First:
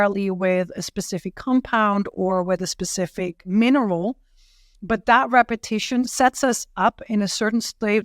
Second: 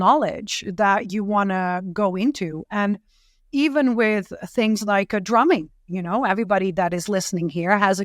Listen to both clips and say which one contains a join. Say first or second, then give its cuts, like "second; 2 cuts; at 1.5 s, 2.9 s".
first; 2 cuts; at 3.4 s, 6.1 s